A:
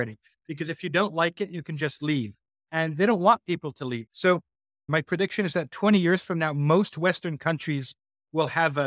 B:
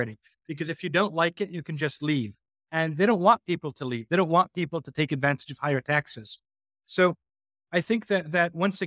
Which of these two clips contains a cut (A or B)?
A